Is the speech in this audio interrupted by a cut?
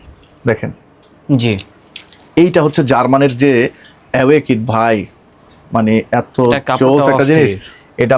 no; 0 cuts

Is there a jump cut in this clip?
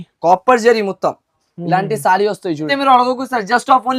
yes; 1 cut; at 2.7 s

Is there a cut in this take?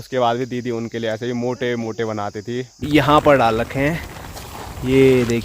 yes; 1 cut; at 2.8 s

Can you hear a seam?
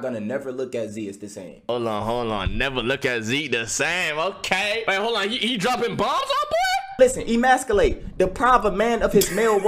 yes; 3 cuts; at 1.7 s, 4.8 s, 6.9 s

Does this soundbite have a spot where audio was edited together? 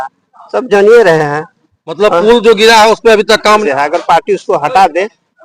yes; 1 cut; at 3.6 s

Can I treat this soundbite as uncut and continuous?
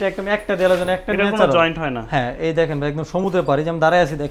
yes; 0 cuts

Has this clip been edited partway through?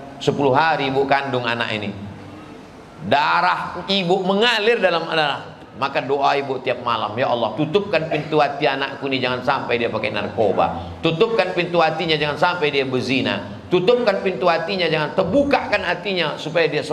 no; 0 cuts

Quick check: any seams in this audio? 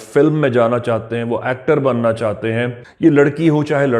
yes; 1 cut; at 2.8 s

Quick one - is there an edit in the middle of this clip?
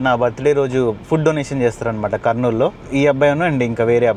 no; 0 cuts

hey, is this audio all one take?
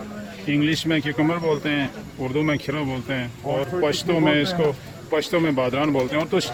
yes; 0 cuts

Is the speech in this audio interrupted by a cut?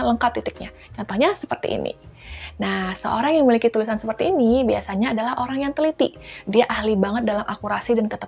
no; 0 cuts

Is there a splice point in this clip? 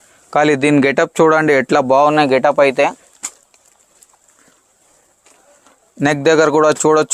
no; 0 cuts

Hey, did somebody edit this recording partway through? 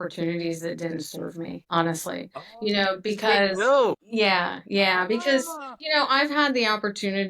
yes; 1 cut; at 4.0 s

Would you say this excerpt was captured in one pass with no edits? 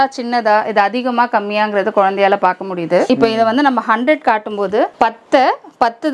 no; 2 cuts; at 3.1 s, 4.9 s

